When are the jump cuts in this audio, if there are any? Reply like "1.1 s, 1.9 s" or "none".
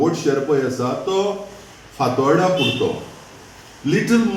none